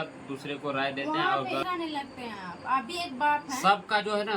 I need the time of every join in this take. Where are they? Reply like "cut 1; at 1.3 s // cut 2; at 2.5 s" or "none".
cut 1; at 1.6 s